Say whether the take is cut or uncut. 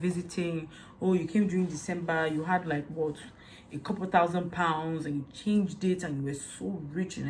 uncut